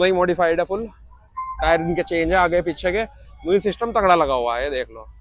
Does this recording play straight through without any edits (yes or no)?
yes